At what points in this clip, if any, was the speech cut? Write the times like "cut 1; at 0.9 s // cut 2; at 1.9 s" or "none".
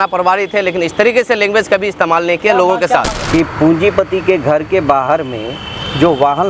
cut 1; at 3.2 s